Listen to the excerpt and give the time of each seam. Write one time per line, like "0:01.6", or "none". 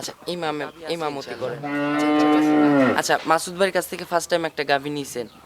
0:01.6